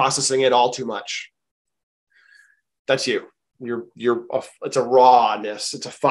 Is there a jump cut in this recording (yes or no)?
no